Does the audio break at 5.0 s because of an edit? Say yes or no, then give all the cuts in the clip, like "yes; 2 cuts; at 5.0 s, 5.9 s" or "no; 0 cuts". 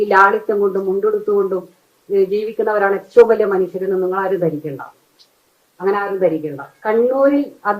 no; 1 cut; at 6.7 s